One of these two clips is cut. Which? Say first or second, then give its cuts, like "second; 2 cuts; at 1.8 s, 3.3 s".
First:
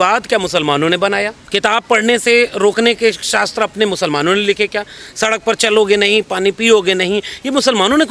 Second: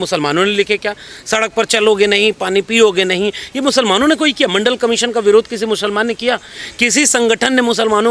first; 1 cut; at 1.4 s